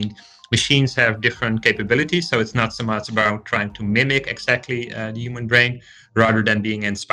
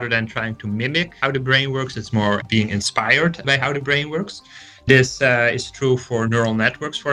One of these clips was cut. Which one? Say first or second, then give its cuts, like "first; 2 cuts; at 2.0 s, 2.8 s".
second; 3 cuts; at 1.2 s, 2.4 s, 3.4 s